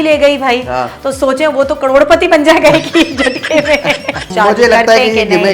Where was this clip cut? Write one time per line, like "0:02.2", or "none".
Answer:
0:04.3